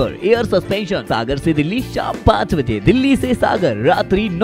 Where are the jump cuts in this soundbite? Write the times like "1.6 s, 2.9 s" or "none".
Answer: 1.0 s